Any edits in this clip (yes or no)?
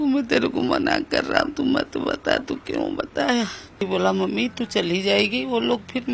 yes